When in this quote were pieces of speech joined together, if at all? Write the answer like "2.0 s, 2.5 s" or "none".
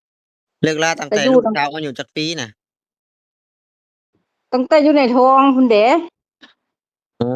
none